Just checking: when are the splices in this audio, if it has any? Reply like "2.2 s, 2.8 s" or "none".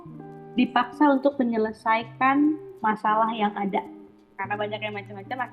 4.3 s